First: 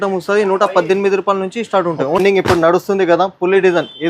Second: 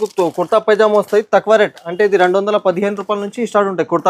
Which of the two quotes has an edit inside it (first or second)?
first